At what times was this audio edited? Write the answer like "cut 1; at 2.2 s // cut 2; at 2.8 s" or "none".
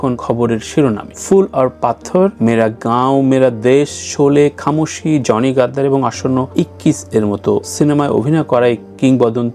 none